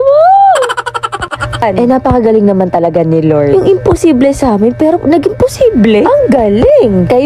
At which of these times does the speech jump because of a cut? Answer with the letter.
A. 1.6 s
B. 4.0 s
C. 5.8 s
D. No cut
A